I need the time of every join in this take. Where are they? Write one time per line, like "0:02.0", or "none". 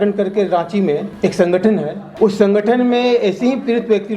0:01.1
0:02.0